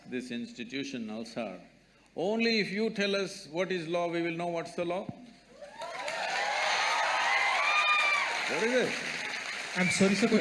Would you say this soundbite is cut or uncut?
uncut